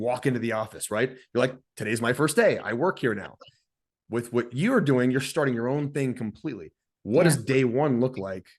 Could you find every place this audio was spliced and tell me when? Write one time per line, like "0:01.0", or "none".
none